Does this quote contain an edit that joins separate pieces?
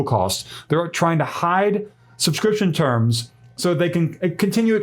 no; 0 cuts

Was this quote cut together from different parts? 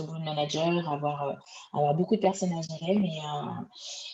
no; 0 cuts

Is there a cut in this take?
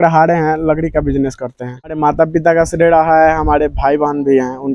yes; 1 cut; at 2.0 s

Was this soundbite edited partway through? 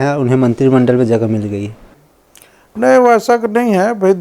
yes; 1 cut; at 2.1 s

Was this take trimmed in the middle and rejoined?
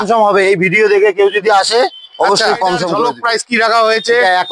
yes; 1 cut; at 2.9 s

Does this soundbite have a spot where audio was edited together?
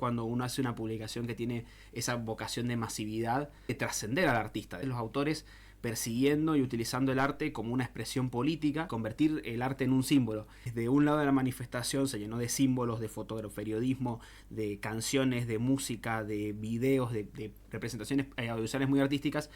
yes; 4 cuts; at 3.8 s, 4.8 s, 8.9 s, 10.7 s

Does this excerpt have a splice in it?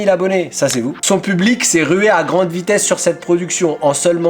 yes; 1 cut; at 1.0 s

